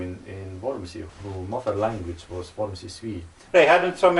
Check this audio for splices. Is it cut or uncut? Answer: cut